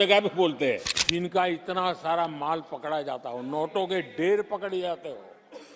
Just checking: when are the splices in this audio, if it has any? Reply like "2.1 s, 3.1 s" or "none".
0.9 s